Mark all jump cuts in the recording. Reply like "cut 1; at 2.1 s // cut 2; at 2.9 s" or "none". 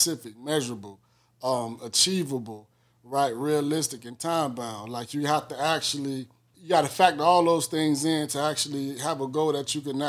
cut 1; at 6.5 s